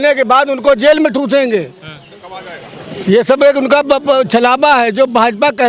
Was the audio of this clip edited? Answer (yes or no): no